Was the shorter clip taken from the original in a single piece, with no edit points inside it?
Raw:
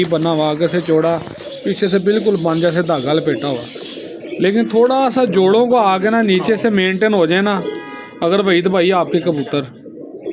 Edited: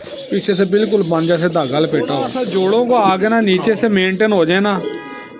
no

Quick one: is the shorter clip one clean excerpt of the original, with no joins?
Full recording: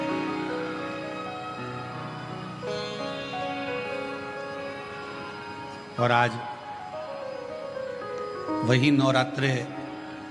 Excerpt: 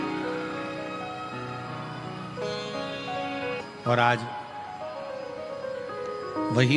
no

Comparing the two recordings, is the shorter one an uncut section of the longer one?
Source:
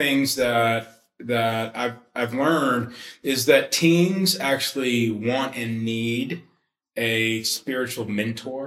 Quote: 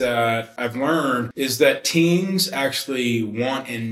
no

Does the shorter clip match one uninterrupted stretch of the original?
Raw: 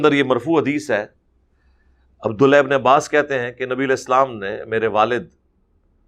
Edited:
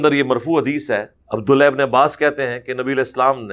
no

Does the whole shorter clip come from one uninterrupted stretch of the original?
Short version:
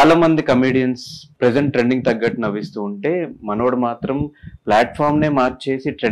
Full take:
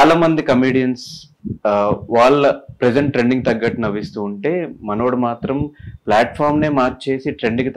no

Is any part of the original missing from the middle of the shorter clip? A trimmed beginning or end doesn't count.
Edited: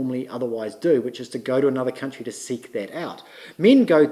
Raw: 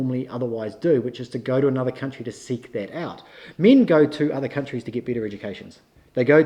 no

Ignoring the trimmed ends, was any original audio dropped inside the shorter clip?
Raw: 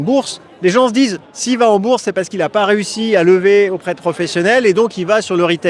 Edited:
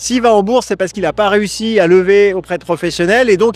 no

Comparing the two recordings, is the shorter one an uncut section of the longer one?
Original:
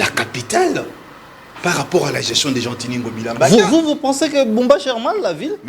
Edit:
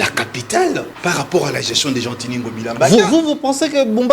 no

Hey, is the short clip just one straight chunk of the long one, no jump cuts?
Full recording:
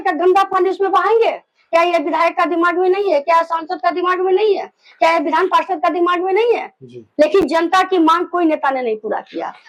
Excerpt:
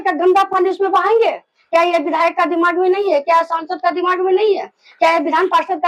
yes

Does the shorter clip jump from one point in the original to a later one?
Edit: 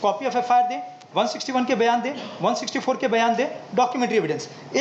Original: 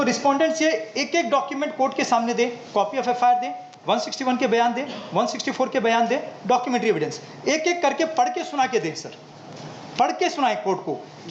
no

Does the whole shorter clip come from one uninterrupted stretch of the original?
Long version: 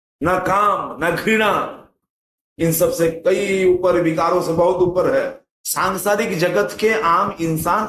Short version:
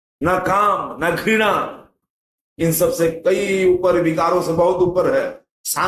yes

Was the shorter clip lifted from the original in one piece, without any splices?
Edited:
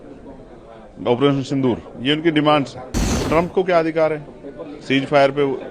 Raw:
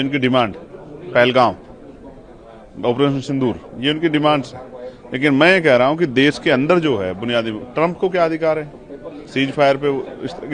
no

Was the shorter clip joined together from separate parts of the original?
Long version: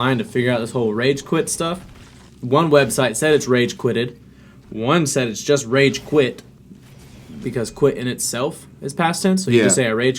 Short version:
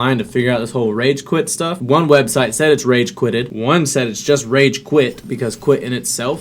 yes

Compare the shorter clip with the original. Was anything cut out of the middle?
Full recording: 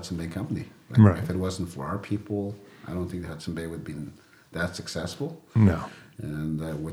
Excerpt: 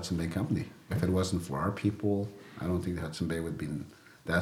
yes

